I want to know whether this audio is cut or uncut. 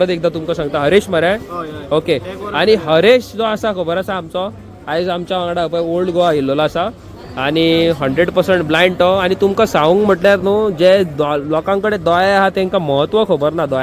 uncut